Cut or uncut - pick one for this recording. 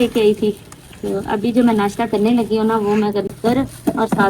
cut